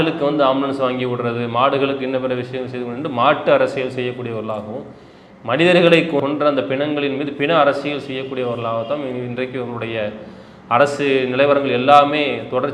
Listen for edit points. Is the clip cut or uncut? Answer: cut